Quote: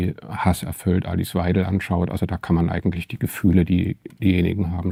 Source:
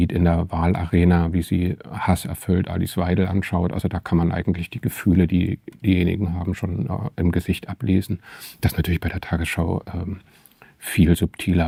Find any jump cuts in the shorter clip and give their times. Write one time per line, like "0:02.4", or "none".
none

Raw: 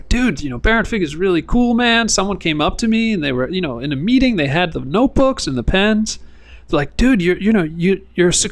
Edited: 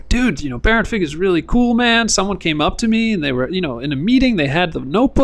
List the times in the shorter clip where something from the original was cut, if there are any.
none

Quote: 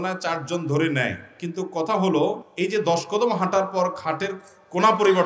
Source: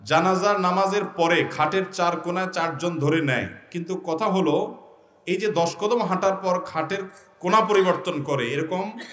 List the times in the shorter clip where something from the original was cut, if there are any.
0:02.5

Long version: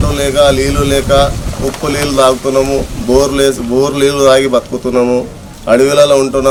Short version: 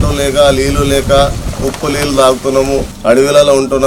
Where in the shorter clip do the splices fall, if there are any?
0:02.9

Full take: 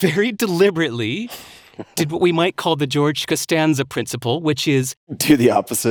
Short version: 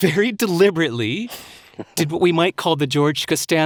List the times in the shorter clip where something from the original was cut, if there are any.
none

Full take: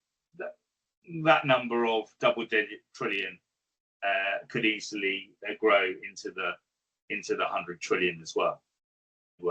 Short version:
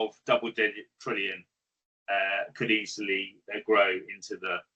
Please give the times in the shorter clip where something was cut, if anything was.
none

